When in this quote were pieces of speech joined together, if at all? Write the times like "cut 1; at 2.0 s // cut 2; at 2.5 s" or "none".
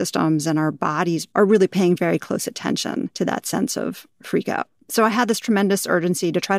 cut 1; at 1.2 s // cut 2; at 3.1 s // cut 3; at 4.8 s

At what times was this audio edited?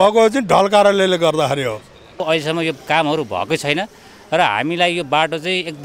cut 1; at 2.2 s

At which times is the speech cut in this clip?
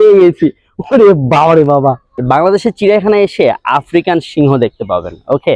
cut 1; at 2.1 s

